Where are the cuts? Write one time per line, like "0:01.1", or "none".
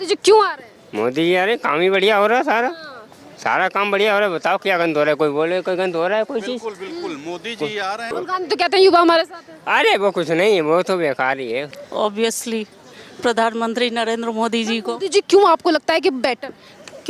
0:08.1
0:11.7